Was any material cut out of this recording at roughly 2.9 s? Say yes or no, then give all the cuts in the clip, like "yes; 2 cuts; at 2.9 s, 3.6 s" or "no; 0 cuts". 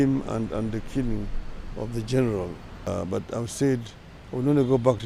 yes; 1 cut; at 2.9 s